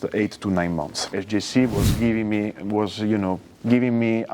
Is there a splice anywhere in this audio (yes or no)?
yes